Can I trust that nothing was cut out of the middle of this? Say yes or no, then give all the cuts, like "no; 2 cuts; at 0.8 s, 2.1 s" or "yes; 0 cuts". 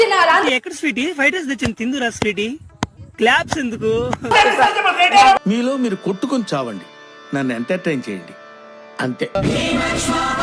no; 2 cuts; at 4.3 s, 9.4 s